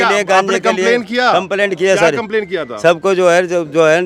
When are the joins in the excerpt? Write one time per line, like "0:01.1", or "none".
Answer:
none